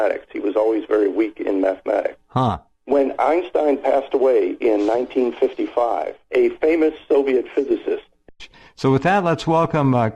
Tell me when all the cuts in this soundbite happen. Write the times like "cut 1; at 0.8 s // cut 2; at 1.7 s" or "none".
none